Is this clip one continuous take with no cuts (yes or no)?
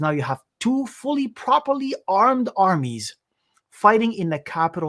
yes